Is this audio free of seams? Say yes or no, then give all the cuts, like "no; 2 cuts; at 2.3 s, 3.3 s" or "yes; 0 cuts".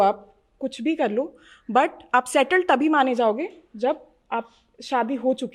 yes; 0 cuts